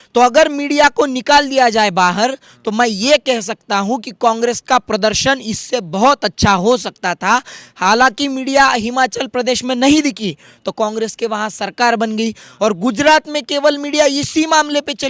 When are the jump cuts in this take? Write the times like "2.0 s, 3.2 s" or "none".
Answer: none